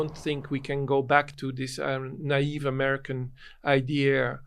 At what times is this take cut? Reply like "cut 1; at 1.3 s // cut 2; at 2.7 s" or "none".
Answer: none